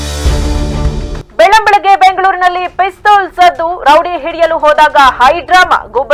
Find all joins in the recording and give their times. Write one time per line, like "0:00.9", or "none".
none